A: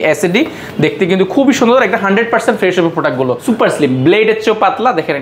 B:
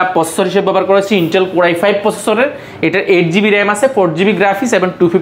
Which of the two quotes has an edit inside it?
A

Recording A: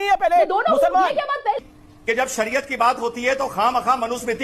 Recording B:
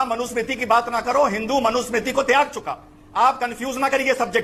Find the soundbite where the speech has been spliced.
A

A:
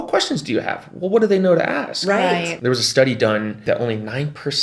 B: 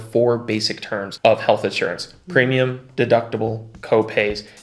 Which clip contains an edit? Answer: A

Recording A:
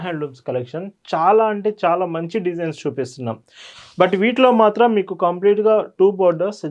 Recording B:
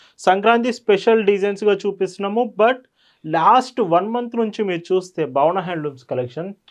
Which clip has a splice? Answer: A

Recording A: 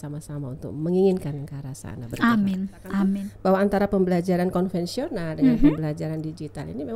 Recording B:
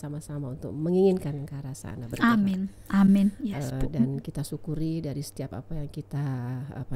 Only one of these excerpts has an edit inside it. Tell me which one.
A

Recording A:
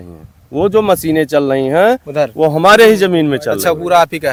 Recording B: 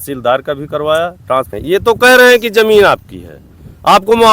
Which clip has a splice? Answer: B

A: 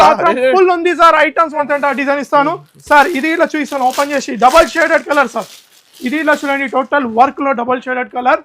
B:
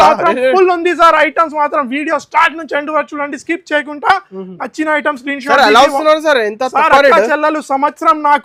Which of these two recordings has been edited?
A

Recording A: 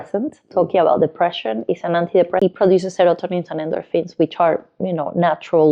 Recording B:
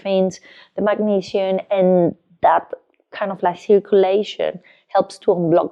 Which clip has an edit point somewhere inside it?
A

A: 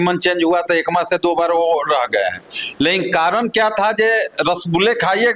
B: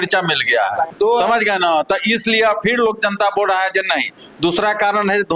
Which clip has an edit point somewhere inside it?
B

